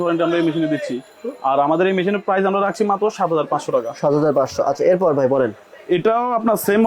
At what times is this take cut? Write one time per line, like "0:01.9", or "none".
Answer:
none